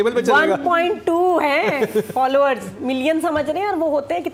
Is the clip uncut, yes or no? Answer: yes